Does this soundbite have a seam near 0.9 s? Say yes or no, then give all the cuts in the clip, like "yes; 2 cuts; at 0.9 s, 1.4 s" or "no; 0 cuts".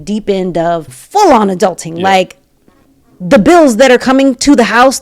yes; 1 cut; at 0.9 s